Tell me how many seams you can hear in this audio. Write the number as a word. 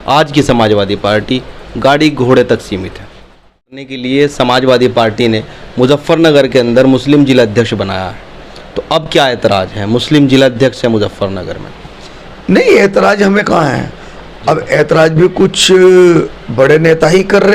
one